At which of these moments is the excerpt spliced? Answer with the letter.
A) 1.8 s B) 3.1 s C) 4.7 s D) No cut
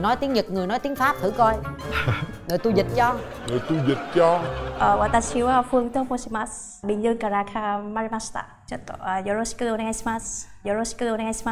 C